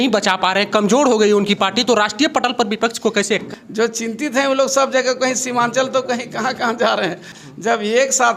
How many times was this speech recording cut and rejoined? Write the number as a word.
two